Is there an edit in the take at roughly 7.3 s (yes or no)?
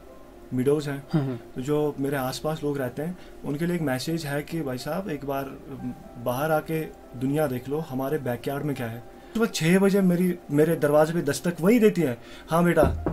no